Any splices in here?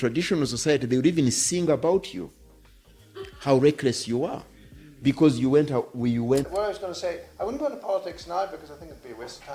yes; 1 cut; at 6.5 s

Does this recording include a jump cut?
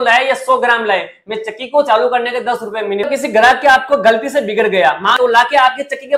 yes; 2 cuts; at 3.1 s, 5.2 s

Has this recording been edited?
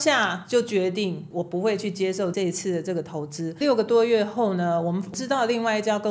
yes; 2 cuts; at 3.6 s, 5.1 s

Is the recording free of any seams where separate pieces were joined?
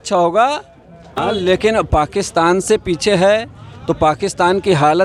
no; 1 cut; at 1.1 s

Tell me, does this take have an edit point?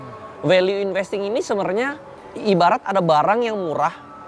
yes; 1 cut; at 2.2 s

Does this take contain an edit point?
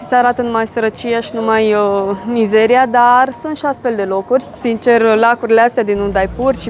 yes; 1 cut; at 4.5 s

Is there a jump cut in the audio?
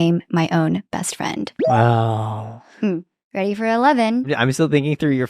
yes; 2 cuts; at 3.2 s, 4.3 s

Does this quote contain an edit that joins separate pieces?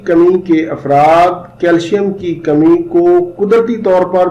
no; 0 cuts

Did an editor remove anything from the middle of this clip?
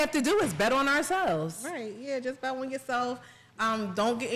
no; 0 cuts

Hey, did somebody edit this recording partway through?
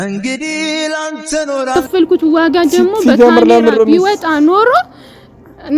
yes; 1 cut; at 1.7 s

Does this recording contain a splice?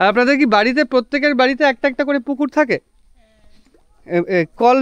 no; 0 cuts

